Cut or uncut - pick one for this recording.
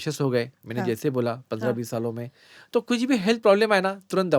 uncut